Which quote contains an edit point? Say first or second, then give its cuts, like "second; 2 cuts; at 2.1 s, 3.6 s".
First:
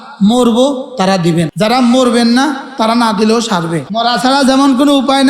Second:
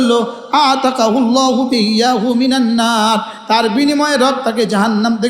first; 2 cuts; at 1.5 s, 3.9 s